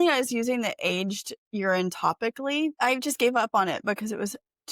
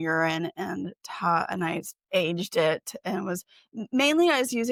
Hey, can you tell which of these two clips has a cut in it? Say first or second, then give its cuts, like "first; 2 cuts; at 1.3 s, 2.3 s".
first; 1 cut; at 2.7 s